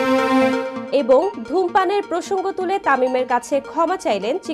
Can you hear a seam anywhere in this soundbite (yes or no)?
no